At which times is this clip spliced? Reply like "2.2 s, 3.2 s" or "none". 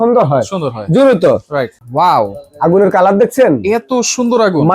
1.7 s